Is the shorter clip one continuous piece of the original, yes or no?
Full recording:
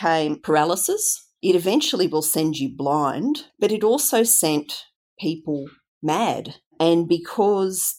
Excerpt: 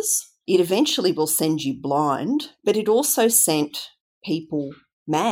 yes